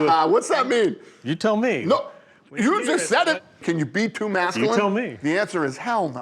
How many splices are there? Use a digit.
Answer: 2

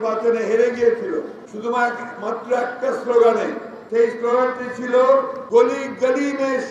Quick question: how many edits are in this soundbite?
3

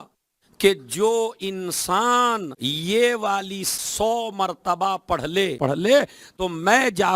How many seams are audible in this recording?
3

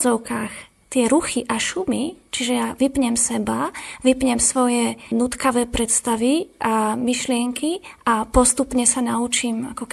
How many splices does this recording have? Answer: 1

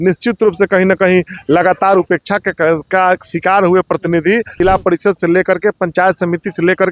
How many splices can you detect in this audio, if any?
1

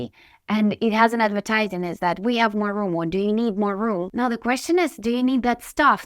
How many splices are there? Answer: 1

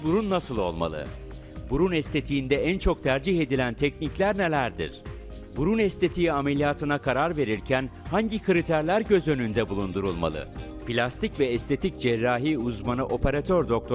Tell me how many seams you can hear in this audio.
0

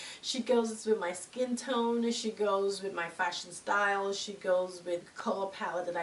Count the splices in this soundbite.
1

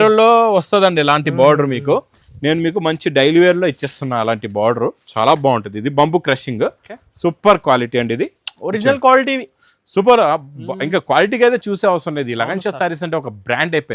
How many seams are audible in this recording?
0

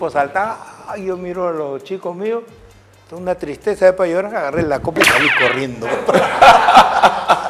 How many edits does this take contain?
0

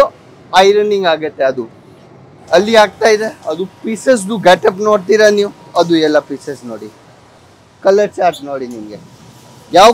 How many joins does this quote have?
0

